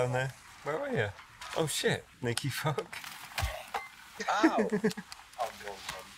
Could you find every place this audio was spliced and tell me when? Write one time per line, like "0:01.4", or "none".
none